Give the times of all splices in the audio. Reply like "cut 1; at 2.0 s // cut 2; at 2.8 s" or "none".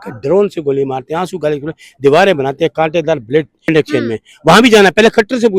cut 1; at 3.7 s